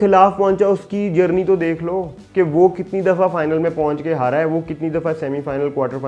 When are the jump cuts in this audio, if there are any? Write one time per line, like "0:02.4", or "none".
none